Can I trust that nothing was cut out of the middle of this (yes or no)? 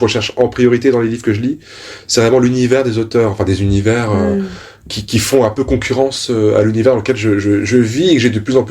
yes